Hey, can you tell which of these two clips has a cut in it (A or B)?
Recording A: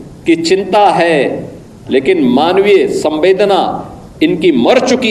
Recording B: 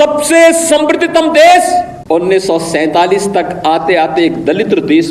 B